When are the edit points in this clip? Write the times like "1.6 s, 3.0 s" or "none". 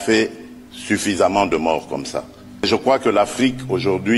none